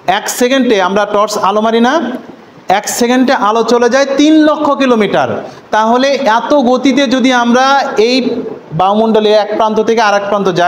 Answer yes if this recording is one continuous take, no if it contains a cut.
yes